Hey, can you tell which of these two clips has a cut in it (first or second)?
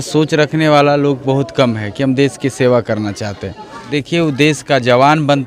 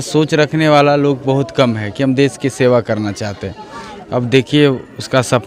first